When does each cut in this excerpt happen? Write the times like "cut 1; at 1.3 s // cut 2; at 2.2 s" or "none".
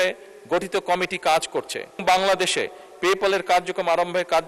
cut 1; at 2.0 s